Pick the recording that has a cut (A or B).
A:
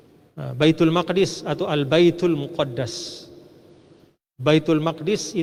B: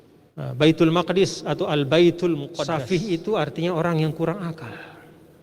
B